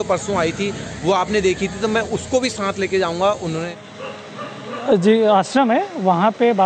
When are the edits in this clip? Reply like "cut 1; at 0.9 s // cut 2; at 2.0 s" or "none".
cut 1; at 3.7 s